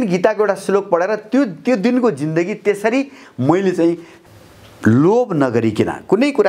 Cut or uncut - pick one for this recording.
uncut